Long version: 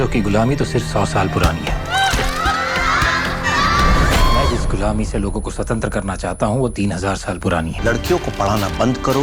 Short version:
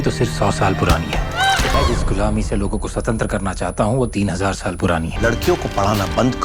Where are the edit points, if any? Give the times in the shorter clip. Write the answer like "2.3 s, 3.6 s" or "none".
1.7 s